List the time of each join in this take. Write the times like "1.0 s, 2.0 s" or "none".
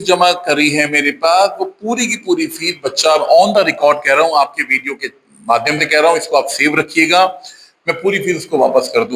none